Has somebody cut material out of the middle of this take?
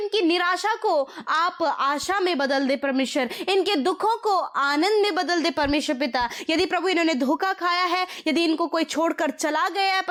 no; 0 cuts

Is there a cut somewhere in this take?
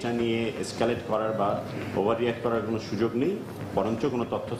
no; 0 cuts

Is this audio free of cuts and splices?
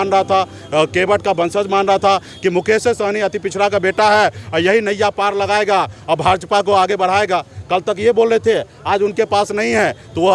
yes; 0 cuts

